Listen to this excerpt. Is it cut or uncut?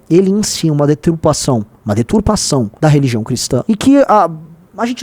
cut